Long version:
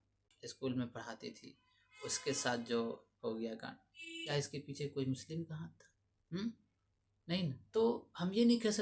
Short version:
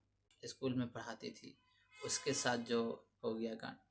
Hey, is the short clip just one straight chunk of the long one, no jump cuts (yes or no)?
yes